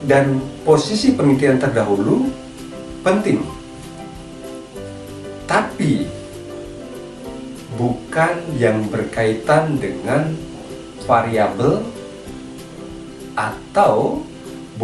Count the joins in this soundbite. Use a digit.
4